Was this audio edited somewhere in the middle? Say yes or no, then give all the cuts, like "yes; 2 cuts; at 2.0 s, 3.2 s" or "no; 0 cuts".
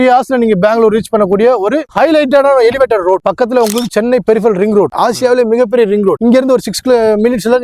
yes; 2 cuts; at 3.2 s, 4.9 s